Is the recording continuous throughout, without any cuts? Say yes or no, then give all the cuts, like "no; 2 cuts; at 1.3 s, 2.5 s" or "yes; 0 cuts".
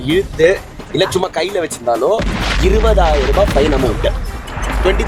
yes; 0 cuts